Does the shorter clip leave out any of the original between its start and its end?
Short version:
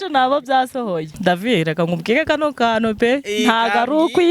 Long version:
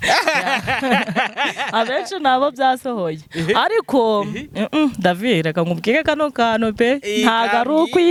yes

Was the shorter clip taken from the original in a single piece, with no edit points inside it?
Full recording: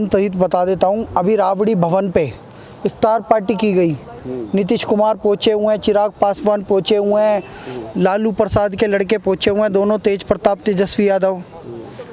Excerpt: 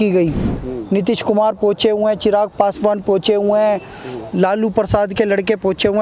yes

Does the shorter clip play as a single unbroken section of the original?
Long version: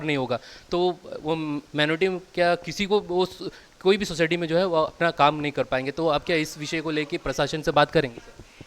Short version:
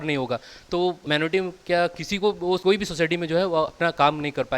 no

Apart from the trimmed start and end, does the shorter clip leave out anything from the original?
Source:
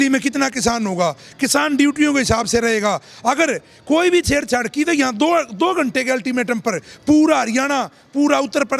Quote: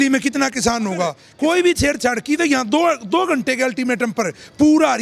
yes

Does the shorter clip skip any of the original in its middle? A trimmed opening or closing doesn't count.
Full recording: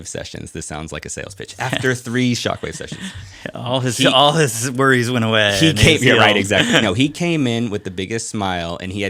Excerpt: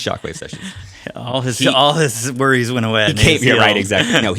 yes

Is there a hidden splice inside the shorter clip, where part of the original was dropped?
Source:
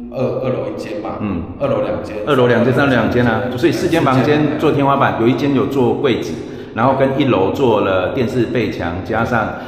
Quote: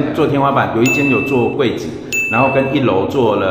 no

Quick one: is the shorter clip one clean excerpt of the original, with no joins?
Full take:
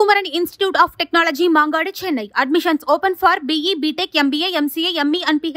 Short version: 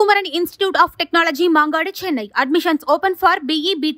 yes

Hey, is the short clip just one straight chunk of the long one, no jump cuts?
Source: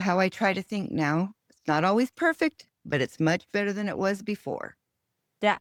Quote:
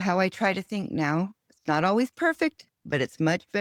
yes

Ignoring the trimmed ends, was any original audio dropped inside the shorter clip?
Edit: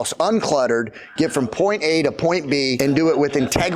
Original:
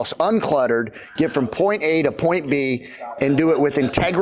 yes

